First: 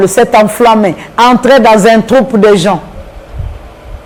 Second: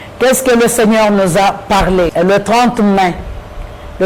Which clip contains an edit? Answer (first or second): second